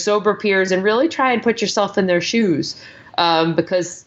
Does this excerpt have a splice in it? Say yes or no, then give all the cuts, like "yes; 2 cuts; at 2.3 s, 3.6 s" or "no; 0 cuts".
no; 0 cuts